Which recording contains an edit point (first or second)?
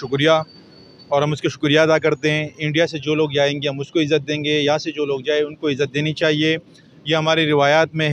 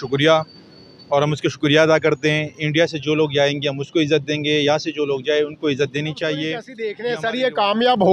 second